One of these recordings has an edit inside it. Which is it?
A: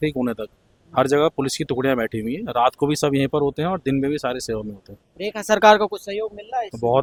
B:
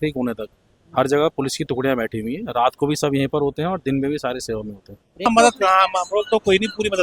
B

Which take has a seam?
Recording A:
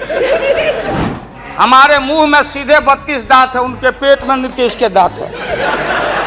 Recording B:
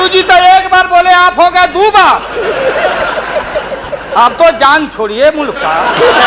A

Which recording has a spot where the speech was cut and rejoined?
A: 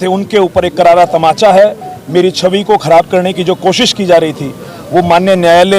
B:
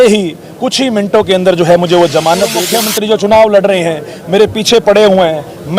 B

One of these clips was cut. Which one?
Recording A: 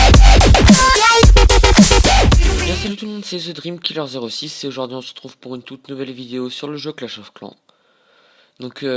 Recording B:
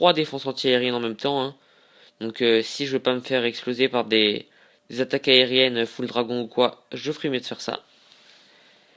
A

